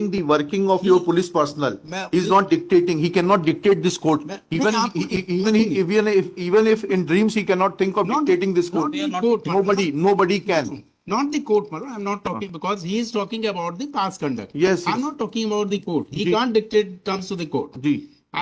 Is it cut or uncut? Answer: uncut